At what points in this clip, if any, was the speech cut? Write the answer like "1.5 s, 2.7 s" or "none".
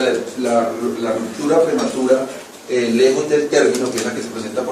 1.0 s